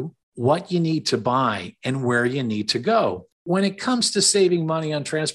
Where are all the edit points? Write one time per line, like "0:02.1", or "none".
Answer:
0:03.3

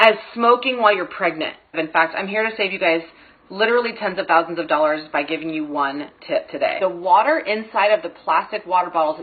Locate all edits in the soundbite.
0:01.7
0:06.8

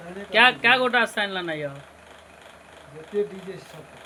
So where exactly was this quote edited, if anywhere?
none

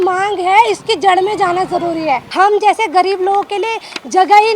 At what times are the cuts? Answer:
0:02.3

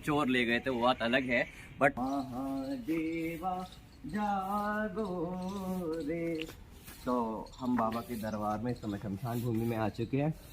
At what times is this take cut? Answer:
0:01.9

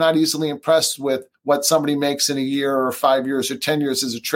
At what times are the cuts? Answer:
0:01.3

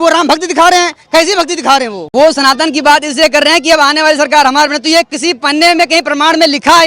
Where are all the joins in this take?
0:02.0

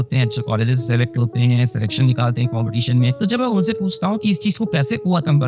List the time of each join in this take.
0:03.2

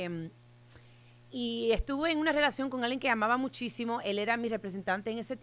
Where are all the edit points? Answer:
none

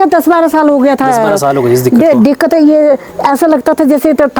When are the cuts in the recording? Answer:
none

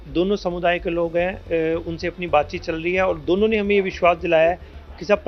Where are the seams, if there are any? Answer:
none

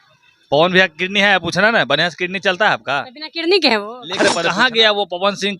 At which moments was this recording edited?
0:04.4

